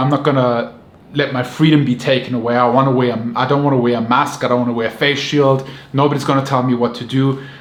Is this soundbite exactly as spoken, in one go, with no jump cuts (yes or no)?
yes